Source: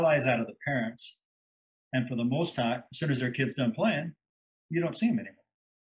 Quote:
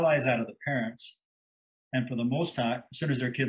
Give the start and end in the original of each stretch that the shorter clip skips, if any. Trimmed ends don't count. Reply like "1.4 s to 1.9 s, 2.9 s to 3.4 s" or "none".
none